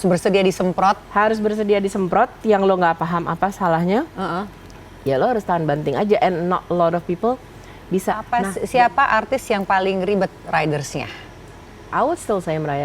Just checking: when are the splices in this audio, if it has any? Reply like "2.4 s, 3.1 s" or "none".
8.4 s